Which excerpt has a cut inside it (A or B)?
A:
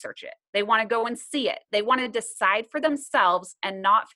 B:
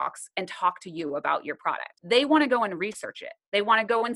B